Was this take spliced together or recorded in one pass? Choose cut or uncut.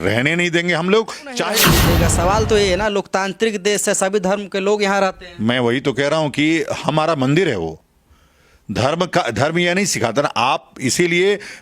cut